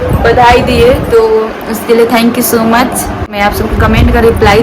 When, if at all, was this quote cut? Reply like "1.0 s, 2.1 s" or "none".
3.3 s